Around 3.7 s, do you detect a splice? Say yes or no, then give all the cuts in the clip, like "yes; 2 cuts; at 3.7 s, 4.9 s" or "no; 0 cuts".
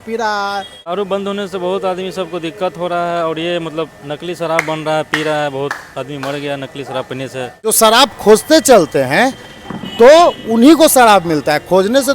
no; 2 cuts; at 0.9 s, 7.8 s